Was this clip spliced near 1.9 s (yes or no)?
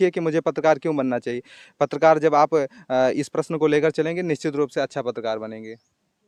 no